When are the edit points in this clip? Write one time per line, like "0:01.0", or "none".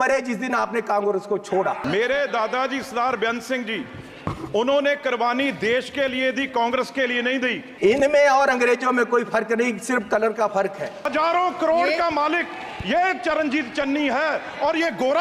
0:01.8
0:07.6
0:11.1